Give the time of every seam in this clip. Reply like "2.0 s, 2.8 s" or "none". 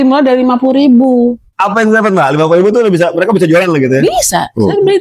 1.5 s